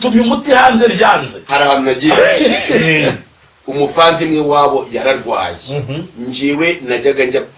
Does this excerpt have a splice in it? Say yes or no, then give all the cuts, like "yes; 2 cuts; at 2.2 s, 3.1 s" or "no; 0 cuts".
yes; 1 cut; at 1.3 s